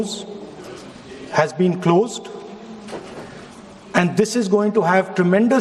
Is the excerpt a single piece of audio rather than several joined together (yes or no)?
yes